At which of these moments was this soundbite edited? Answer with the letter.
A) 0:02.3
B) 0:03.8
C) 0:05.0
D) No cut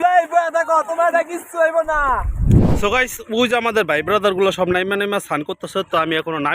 A